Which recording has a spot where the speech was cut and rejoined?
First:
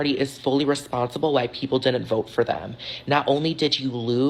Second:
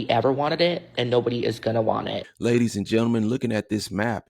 second; 1 cut; at 2.3 s

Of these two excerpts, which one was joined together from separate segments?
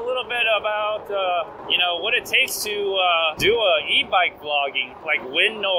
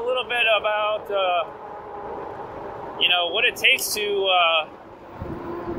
first; 3 cuts; at 1.6 s, 3.4 s, 4.9 s

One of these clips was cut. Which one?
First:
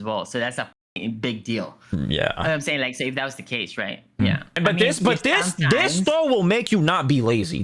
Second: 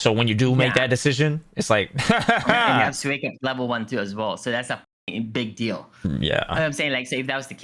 first; 1 cut; at 4.5 s

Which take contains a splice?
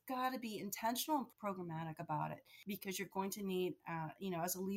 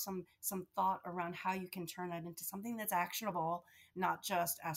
first; 2 cuts; at 1.3 s, 2.5 s

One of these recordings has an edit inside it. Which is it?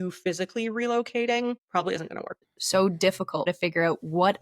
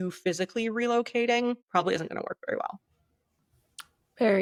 first; 2 cuts; at 2.4 s, 3.5 s

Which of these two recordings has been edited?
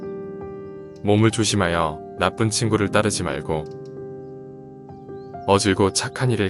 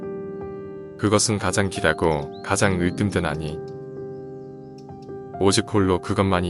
second; 3 cuts; at 1.0 s, 3.6 s, 5.4 s

